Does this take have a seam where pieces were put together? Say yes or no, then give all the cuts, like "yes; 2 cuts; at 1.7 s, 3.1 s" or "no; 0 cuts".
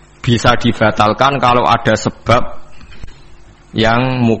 no; 0 cuts